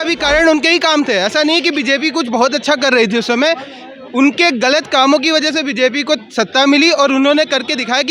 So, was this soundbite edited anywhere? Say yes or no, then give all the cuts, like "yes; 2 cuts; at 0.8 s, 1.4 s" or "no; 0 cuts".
no; 0 cuts